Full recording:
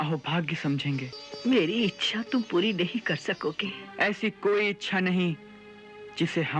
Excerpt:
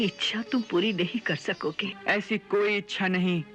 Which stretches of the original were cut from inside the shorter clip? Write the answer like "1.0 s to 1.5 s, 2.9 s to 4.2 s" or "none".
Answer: 3.7 s to 3.8 s